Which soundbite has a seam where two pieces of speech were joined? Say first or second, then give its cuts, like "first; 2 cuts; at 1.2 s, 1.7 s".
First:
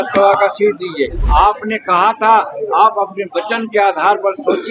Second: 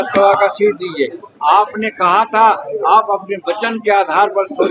first; 1 cut; at 1.2 s